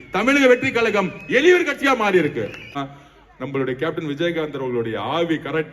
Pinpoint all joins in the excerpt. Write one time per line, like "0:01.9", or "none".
0:02.8